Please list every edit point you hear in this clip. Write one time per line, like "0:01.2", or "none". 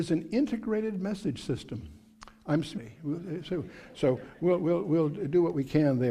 none